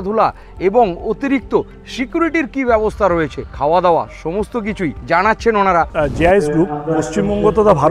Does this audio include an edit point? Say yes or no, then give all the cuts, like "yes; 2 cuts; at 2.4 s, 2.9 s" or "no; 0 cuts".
yes; 3 cuts; at 3.4 s, 5.0 s, 5.9 s